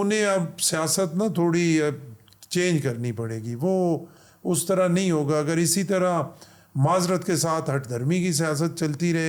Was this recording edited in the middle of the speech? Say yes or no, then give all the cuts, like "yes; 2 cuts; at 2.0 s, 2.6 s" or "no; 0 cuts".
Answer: no; 0 cuts